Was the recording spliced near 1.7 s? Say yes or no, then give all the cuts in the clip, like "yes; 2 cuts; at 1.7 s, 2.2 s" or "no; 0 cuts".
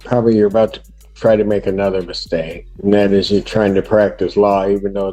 no; 0 cuts